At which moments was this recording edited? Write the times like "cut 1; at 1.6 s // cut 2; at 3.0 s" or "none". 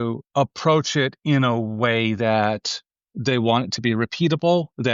none